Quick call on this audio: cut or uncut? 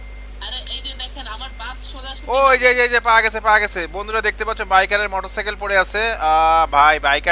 uncut